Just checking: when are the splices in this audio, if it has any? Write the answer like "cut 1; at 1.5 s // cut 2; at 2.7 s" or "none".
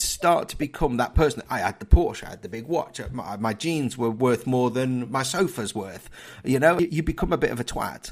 cut 1; at 6.8 s